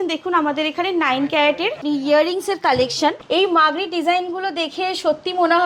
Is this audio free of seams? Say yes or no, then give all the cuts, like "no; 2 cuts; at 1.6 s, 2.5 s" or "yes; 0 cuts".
no; 2 cuts; at 1.8 s, 3.2 s